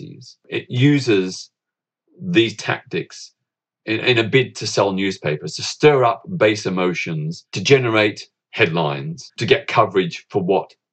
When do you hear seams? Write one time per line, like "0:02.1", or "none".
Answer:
0:07.6
0:08.4
0:09.3